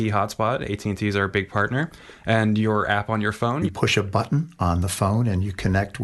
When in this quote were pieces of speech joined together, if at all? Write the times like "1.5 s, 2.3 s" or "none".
3.7 s